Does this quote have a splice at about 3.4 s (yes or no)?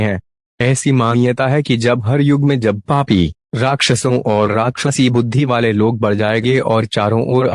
no